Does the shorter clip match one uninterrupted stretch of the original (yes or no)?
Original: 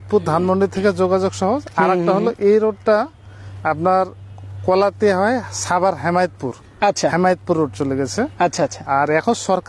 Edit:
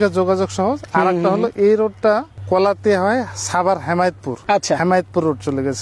no